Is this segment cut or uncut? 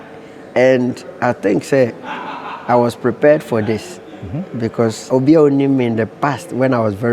cut